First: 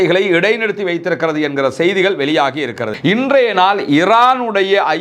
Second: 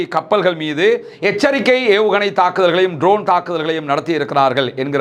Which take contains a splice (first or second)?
first